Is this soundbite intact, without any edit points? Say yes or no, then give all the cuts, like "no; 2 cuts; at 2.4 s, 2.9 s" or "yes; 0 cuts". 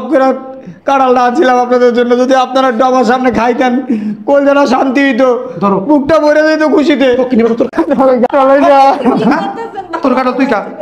yes; 0 cuts